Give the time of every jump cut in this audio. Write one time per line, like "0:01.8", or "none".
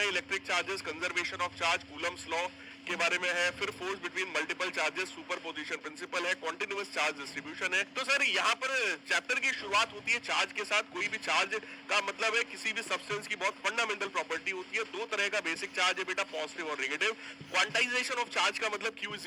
0:07.9
0:17.3

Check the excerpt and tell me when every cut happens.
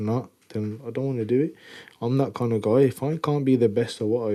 none

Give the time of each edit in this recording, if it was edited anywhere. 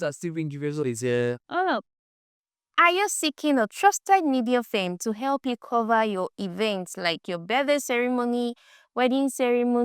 none

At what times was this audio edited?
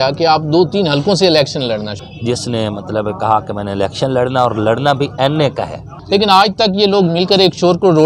0:01.9
0:05.9

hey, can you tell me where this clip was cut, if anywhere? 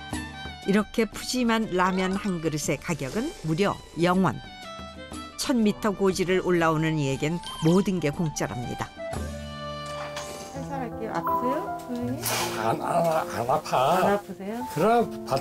0:10.4

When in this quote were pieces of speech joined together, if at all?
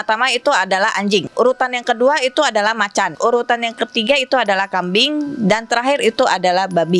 0:01.3
0:03.1

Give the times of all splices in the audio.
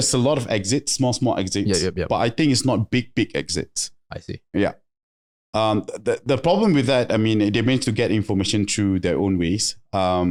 none

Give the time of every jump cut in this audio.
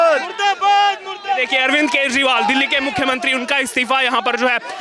none

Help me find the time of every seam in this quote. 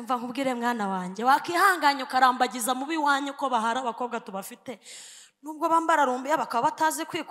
none

